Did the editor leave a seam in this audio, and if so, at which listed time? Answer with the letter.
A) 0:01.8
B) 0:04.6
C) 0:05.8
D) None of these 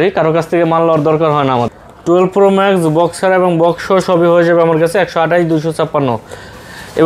A